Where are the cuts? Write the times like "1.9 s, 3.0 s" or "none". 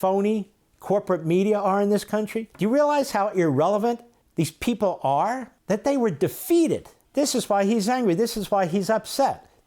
2.4 s, 4.1 s, 5.5 s, 7.0 s